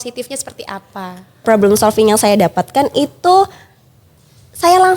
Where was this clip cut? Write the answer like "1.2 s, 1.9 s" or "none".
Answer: 1.4 s